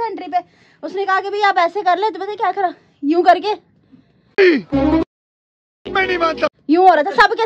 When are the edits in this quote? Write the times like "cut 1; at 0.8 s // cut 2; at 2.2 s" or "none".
none